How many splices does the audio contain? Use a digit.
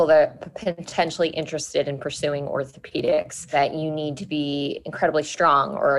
1